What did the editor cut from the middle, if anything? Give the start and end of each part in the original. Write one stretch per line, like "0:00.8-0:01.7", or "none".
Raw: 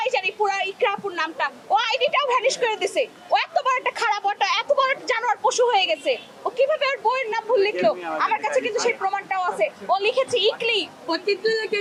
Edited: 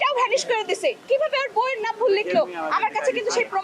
0:03.1-0:06.5